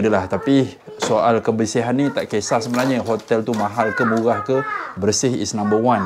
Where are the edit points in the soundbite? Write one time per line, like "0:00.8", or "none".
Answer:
none

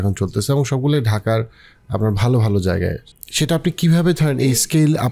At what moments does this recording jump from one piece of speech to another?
0:03.1

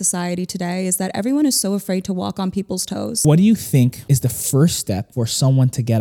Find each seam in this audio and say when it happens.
0:03.1
0:04.0
0:05.1

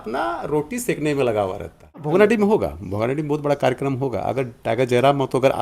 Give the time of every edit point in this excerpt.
0:02.0

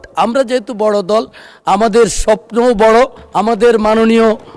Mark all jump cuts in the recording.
0:03.2

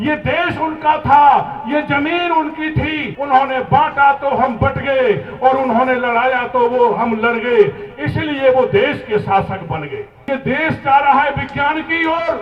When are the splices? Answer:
0:03.1
0:10.1

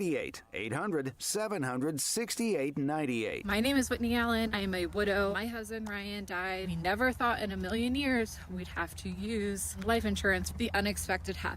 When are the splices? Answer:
0:03.4

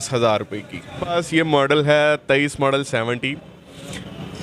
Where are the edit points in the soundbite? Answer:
0:01.1

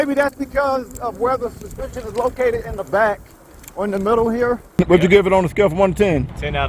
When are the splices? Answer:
0:04.7

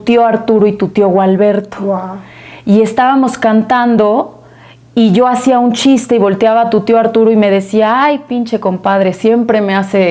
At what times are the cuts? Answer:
none

